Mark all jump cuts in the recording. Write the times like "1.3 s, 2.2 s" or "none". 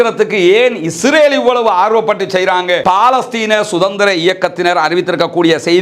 2.8 s